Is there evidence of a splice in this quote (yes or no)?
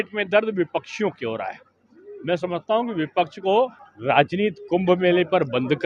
yes